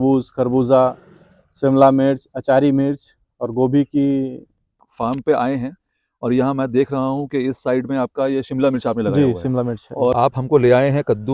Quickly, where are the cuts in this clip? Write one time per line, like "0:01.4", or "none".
0:04.8
0:10.1